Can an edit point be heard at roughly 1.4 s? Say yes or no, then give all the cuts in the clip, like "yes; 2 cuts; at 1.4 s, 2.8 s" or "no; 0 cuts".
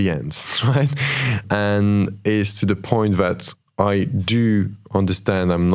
yes; 1 cut; at 1.4 s